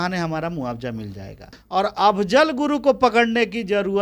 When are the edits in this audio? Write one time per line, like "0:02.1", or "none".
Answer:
0:01.6